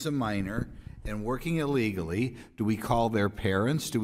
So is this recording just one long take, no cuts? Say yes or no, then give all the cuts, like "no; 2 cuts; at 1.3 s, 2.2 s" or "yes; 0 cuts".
no; 1 cut; at 1.9 s